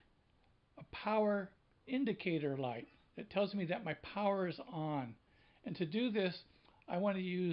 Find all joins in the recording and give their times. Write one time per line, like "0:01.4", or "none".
0:05.6

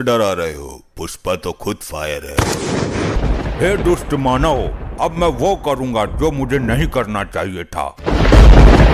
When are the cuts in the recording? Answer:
0:03.2
0:07.9

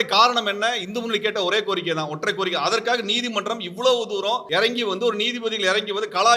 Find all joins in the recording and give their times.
0:04.4

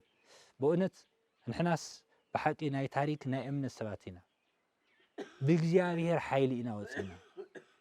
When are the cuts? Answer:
none

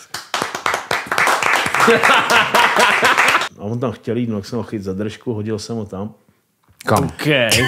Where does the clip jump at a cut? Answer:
0:03.4

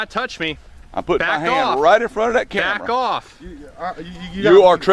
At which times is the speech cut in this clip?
none

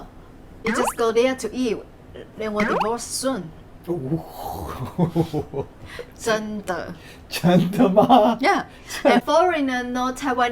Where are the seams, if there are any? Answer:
none

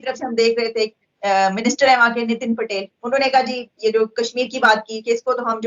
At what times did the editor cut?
none

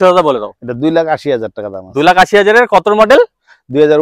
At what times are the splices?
none

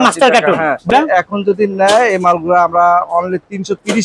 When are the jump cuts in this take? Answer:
0:00.9

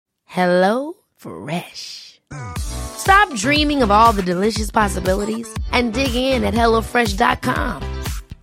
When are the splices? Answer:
none

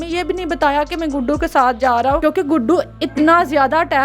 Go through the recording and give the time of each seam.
0:02.2

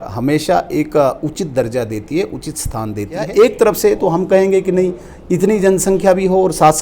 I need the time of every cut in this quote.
0:03.3

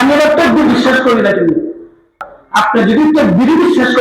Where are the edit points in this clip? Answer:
0:02.2

